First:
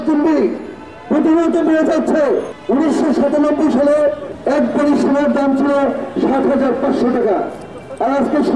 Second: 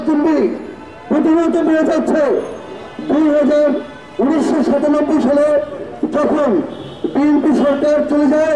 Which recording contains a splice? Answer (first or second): first